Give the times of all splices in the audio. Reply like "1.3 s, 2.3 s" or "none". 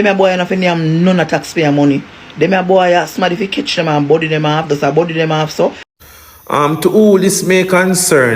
5.9 s